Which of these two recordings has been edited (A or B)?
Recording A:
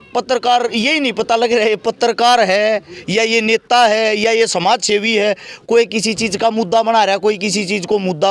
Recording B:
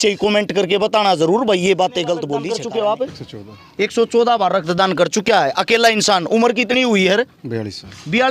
B